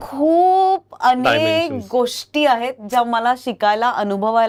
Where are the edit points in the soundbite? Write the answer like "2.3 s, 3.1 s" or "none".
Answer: none